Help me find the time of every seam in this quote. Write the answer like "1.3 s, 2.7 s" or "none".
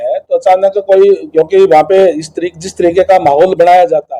none